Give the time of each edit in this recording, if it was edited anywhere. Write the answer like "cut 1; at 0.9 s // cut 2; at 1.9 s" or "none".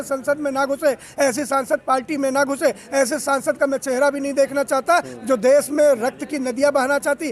none